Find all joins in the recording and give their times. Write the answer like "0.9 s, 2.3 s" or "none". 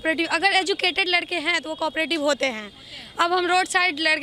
none